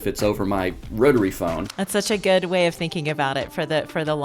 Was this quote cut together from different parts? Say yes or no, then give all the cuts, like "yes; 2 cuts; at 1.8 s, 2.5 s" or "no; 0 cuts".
yes; 1 cut; at 1.7 s